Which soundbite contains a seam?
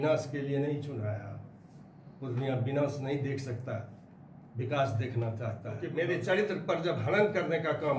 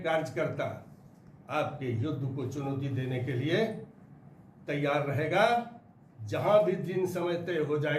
first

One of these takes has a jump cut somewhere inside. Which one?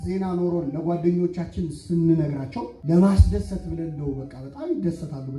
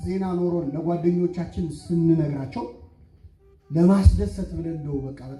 first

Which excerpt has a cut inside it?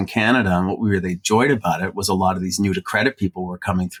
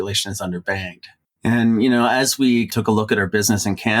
second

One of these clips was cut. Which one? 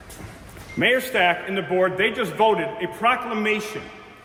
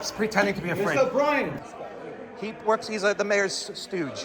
second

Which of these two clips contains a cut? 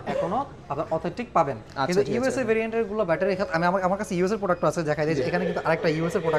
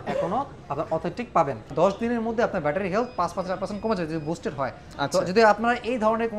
second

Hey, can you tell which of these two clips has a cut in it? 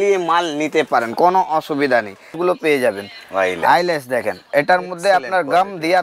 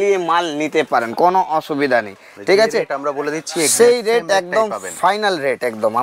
first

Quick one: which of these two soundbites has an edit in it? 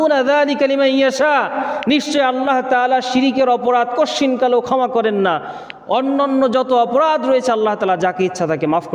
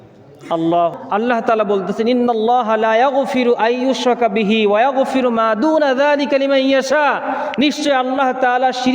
second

